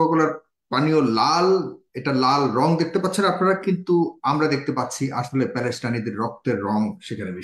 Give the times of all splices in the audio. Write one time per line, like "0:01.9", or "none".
none